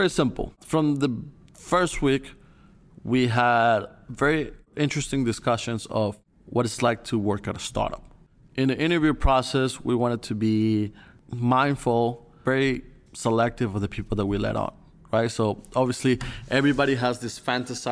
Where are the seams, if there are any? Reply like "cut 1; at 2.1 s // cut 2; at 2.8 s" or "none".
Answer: cut 1; at 8.3 s // cut 2; at 12.4 s